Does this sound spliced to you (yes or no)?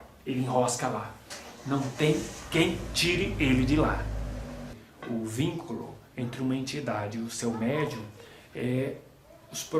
yes